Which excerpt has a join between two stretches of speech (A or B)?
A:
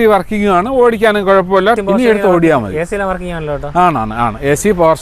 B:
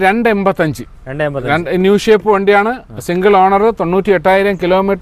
A